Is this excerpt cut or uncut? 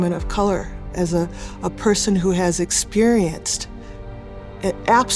uncut